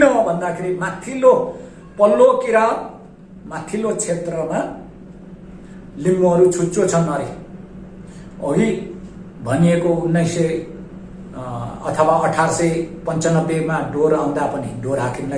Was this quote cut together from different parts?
no; 0 cuts

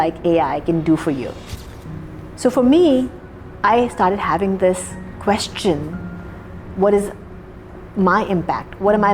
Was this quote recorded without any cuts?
no; 1 cut; at 1.4 s

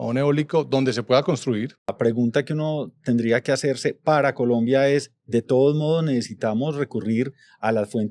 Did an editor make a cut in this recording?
yes; 1 cut; at 1.9 s

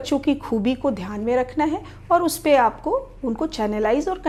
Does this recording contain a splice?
no; 0 cuts

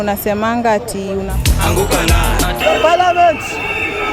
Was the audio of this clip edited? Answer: yes; 1 cut; at 1.3 s

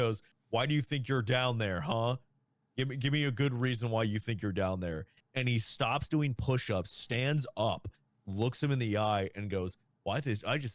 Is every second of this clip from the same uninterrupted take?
yes; 0 cuts

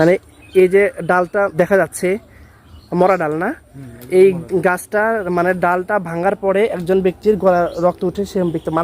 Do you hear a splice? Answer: yes; 1 cut; at 1.5 s

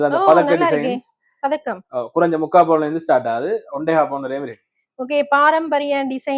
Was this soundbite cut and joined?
no; 0 cuts

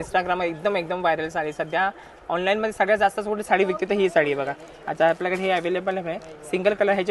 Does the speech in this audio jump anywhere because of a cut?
no; 0 cuts

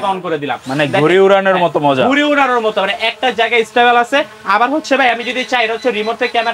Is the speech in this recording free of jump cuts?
yes; 0 cuts

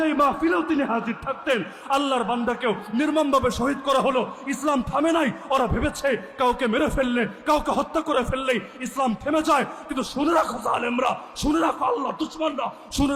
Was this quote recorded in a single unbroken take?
yes; 0 cuts

